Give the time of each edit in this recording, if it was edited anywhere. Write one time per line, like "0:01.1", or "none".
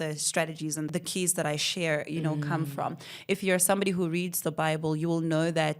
0:00.9